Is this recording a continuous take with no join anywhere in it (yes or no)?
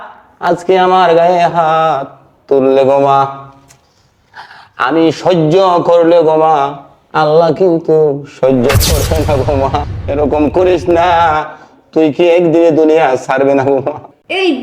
no